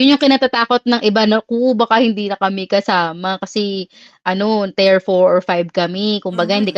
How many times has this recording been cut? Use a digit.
0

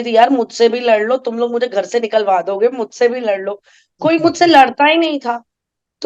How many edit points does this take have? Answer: 0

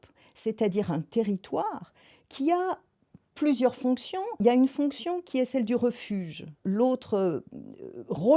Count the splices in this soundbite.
2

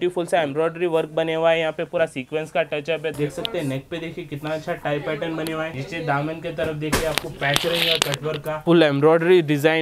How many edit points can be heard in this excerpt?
3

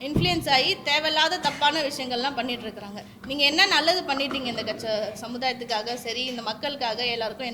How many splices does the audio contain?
0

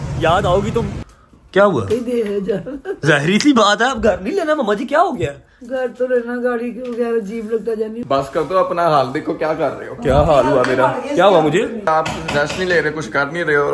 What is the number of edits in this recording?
3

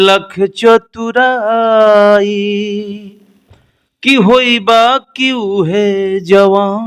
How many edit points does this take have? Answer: 0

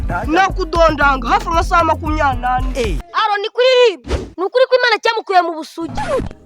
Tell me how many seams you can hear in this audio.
1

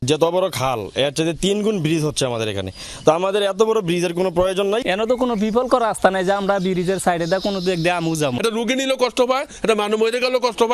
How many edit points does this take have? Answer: 0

